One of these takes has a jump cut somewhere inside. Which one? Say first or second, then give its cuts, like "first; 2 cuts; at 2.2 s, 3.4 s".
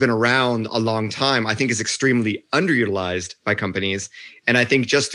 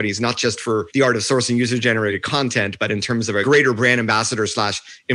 second; 3 cuts; at 0.9 s, 2.2 s, 3.4 s